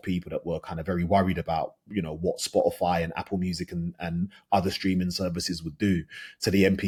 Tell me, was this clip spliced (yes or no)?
no